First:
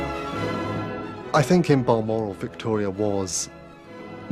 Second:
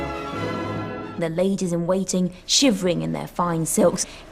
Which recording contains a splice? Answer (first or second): first